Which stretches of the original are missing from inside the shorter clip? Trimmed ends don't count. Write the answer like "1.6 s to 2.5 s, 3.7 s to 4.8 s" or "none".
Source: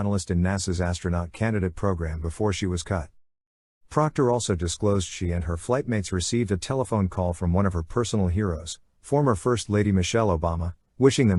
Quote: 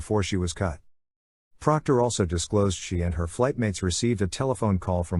none